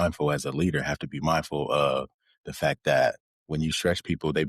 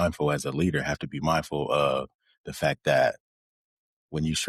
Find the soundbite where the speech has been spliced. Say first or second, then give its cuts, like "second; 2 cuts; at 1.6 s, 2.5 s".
first; 1 cut; at 3.3 s